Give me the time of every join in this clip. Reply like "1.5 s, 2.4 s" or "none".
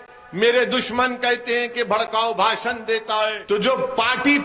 3.4 s